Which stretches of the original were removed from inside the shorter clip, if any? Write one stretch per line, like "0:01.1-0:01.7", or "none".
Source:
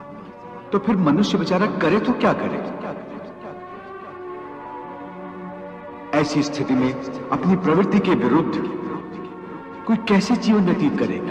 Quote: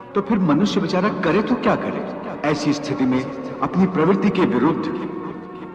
0:02.8-0:06.0